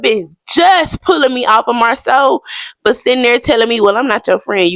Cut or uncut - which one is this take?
uncut